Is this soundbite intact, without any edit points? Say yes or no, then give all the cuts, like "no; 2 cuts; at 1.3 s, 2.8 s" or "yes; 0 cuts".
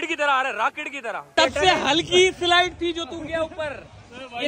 no; 1 cut; at 1.3 s